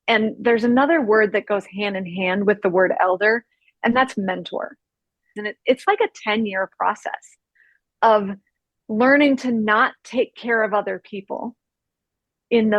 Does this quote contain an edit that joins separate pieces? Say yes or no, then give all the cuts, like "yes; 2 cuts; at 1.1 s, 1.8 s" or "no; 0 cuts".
yes; 1 cut; at 5.4 s